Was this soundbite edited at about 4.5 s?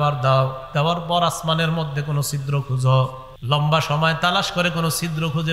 no; 1 cut; at 3.3 s

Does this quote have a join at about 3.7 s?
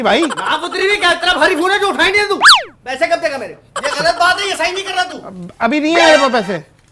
yes; 1 cut; at 3.7 s

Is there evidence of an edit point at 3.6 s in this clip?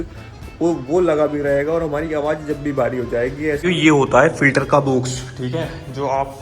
yes; 1 cut; at 3.6 s

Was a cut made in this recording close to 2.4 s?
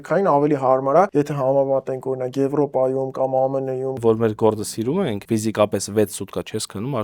no; 3 cuts; at 1.1 s, 4.0 s, 5.2 s

